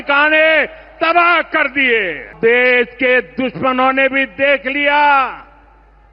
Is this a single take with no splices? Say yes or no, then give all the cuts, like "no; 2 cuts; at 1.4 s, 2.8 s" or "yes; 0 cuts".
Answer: no; 1 cut; at 2.3 s